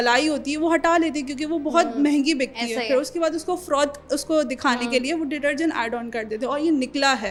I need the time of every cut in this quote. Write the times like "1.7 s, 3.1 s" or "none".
none

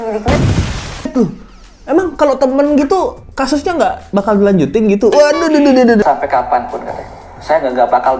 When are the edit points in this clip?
1.1 s, 6.0 s

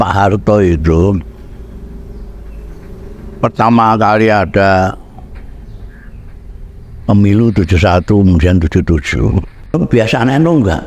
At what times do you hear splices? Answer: 9.7 s

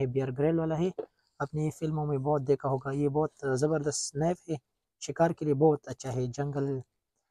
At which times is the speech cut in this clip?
none

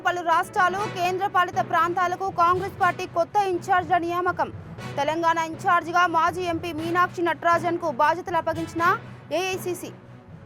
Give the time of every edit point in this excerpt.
none

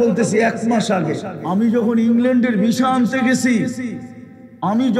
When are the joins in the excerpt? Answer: 1.3 s

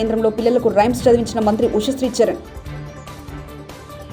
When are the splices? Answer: none

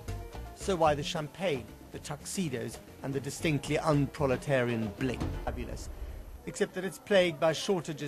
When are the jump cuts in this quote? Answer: none

